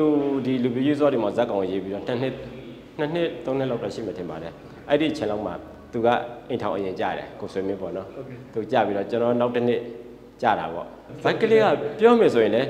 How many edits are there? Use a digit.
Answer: 1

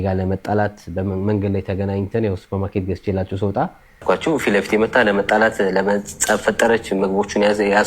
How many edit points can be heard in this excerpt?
1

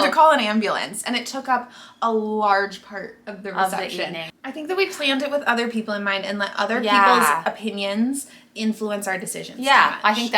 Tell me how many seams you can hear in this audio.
1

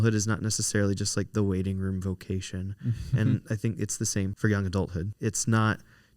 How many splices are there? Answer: 2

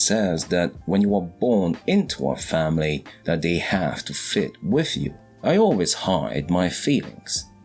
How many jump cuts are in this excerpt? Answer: 1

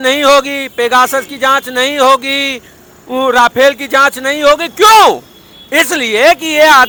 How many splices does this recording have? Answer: 0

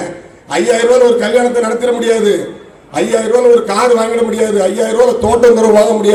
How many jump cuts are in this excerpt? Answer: 0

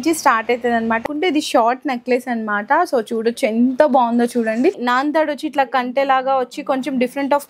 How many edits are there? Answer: 2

